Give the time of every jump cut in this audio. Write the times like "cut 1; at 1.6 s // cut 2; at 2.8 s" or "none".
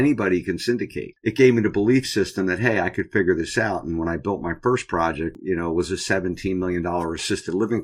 cut 1; at 1.0 s // cut 2; at 5.3 s